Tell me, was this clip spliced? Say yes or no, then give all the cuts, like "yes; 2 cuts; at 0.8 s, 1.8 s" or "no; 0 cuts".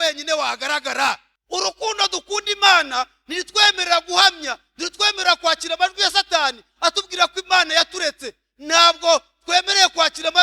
yes; 1 cut; at 1.3 s